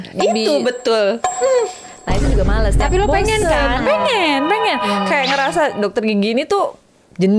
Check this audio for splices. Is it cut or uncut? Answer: uncut